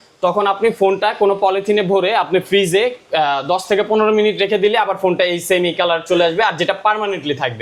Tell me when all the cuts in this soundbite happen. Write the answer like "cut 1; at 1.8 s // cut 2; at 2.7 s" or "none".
none